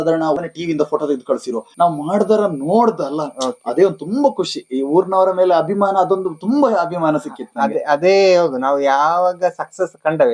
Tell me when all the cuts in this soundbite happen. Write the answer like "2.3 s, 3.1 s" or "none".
1.6 s

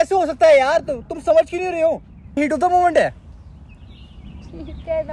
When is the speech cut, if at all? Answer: 2.4 s

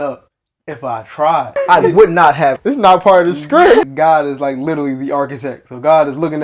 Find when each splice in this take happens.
1.5 s, 2.6 s, 3.9 s

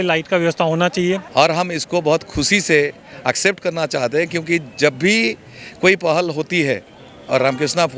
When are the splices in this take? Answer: 1.2 s

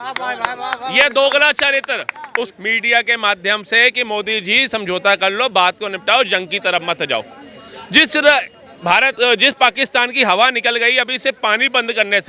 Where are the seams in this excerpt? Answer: 2.5 s

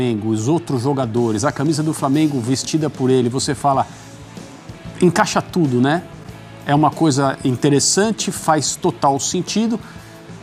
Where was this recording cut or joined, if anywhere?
none

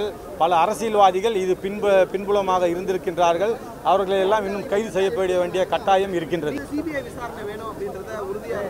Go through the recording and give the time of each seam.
6.6 s

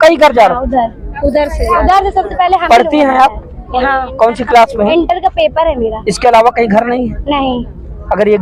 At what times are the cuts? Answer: none

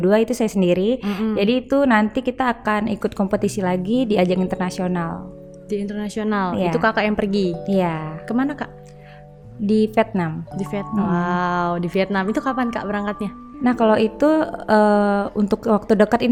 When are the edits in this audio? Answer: none

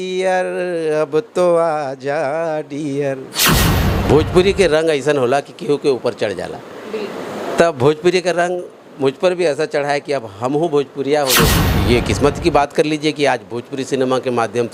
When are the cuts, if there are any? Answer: 3.8 s, 11.6 s

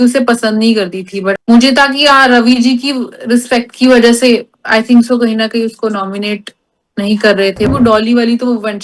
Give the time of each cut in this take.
1.3 s, 7.7 s

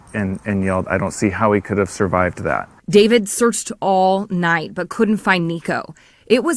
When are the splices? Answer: none

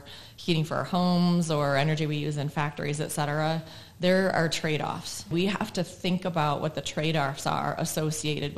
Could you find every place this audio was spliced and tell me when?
5.3 s

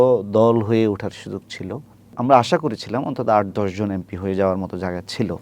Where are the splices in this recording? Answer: 2.1 s

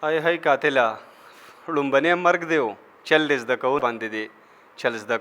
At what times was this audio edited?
3.8 s

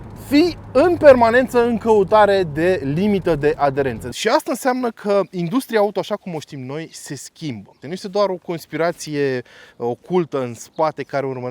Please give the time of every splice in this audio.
4.1 s, 7.8 s

